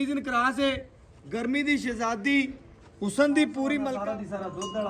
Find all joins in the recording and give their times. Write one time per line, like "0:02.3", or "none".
0:03.9